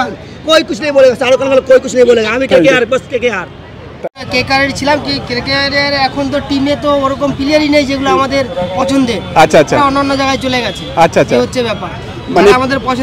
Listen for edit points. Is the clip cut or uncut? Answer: cut